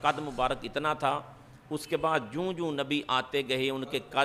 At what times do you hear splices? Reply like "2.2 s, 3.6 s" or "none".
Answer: none